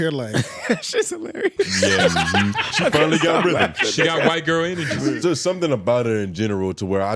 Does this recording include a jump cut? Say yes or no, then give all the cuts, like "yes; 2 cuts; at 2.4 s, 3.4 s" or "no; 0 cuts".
yes; 1 cut; at 5.1 s